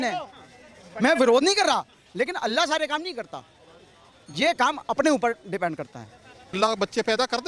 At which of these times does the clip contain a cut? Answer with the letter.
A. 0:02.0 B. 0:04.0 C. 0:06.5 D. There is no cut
C